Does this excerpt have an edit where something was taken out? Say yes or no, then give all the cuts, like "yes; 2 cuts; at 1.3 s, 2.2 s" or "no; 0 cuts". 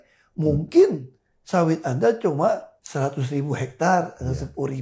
yes; 1 cut; at 2.8 s